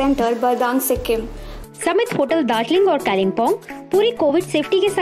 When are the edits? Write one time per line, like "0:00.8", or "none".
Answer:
0:01.5